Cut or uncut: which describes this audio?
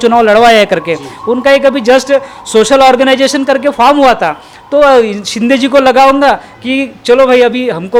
uncut